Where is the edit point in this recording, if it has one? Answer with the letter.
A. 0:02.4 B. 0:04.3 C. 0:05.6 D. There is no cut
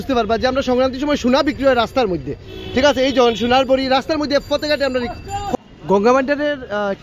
C